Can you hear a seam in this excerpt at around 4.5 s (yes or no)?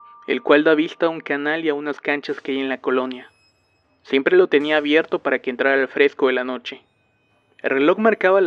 yes